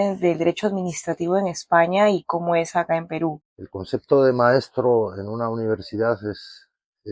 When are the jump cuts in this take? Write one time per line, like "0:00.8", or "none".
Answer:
0:03.4